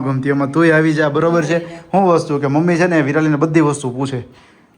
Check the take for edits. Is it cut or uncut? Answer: uncut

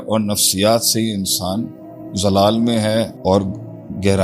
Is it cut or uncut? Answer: cut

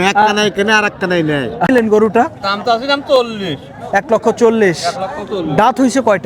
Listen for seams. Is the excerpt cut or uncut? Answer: cut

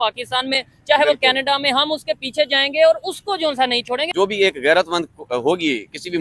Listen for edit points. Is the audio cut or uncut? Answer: cut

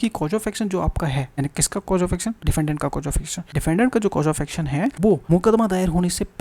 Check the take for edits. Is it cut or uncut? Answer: cut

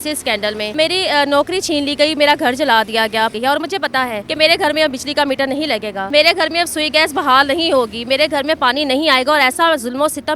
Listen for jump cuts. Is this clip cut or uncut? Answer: cut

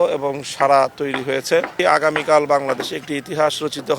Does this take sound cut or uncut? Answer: cut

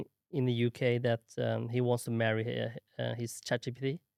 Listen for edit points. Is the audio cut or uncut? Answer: uncut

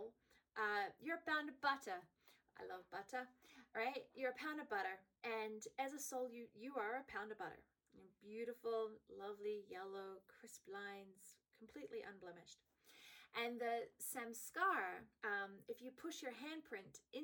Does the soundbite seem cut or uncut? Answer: cut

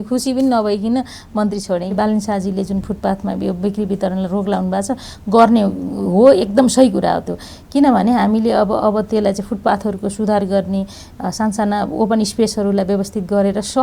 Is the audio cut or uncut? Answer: cut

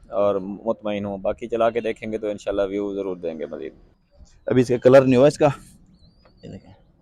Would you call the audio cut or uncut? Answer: cut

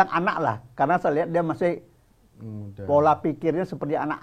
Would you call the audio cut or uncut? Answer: uncut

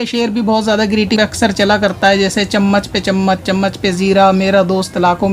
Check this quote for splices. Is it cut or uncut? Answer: cut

